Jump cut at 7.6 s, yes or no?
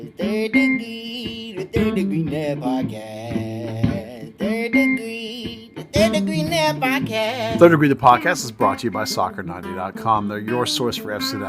yes